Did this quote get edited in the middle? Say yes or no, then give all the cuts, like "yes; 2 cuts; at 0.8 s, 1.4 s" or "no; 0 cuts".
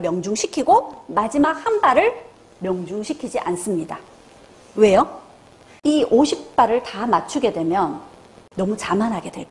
no; 0 cuts